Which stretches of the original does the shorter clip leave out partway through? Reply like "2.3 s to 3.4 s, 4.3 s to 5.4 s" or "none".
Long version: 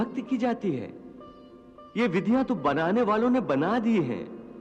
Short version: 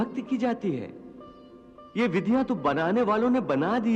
none

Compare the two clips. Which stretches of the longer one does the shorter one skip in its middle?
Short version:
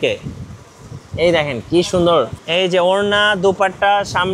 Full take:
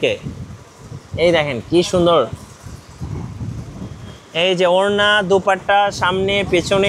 2.4 s to 4.3 s

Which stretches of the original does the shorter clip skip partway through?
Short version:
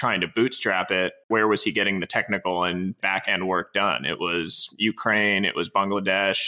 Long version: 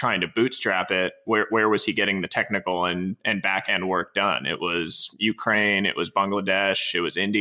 1.2 s to 1.5 s, 3.2 s to 3.4 s

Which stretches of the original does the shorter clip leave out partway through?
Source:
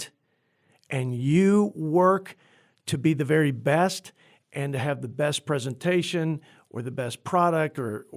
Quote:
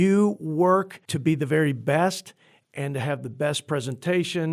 2.4 s to 2.8 s

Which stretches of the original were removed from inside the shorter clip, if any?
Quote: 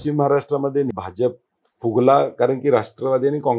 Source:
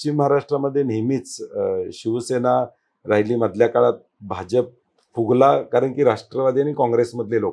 0.9 s to 4.3 s

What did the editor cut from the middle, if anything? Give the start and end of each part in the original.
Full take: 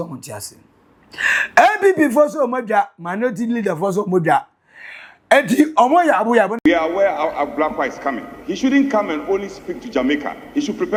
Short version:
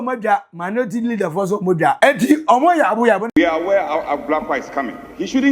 4.4 s to 5.3 s

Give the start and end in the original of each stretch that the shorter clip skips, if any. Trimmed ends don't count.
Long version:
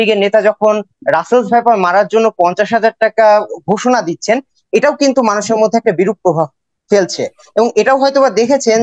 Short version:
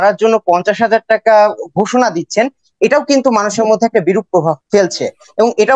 6.5 s to 6.8 s

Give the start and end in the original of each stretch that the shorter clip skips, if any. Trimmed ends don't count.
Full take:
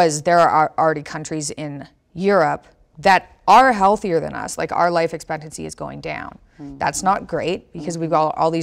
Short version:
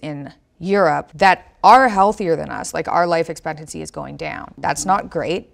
2.6 s to 2.9 s, 6.3 s to 6.7 s

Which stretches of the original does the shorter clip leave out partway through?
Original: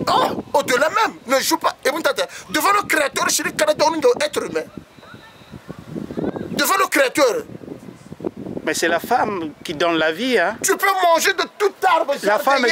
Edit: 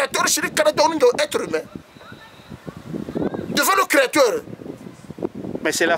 none

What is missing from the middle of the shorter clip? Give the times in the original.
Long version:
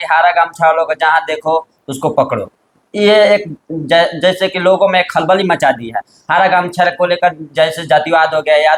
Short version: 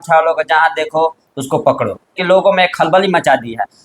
2.7 s to 4.5 s

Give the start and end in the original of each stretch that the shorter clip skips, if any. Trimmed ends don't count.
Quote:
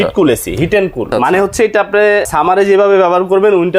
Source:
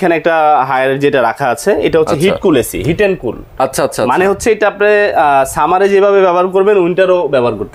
3.3 s to 3.9 s, 5.1 s to 5.5 s

